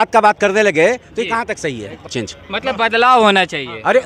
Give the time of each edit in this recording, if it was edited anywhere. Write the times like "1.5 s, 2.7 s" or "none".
2.1 s